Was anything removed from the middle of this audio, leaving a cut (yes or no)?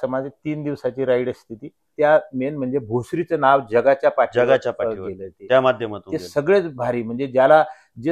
yes